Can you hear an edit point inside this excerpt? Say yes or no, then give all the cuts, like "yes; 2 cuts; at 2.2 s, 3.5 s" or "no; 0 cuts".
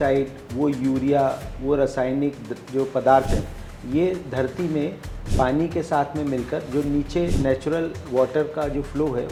no; 0 cuts